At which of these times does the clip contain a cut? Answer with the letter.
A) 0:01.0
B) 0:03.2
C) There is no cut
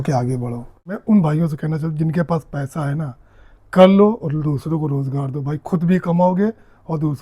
A